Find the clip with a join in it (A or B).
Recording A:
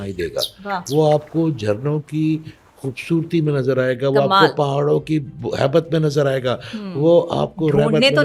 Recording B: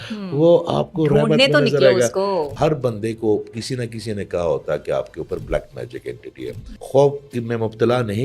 B